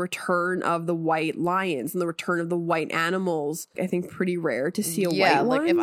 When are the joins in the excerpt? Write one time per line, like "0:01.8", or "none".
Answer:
0:03.8